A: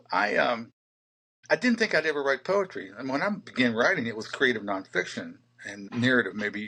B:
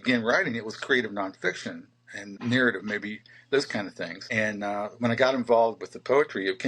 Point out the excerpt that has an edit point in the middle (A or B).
B